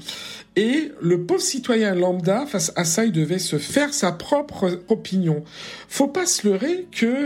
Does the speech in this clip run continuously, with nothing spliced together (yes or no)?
no